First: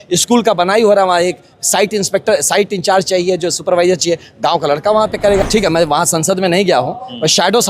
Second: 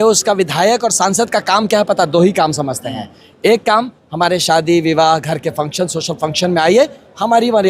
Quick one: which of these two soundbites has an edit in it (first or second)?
first